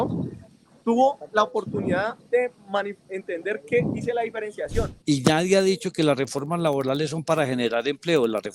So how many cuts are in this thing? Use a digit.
1